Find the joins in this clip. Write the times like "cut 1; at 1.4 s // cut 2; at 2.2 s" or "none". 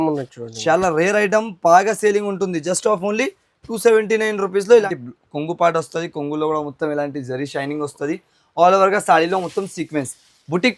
cut 1; at 4.8 s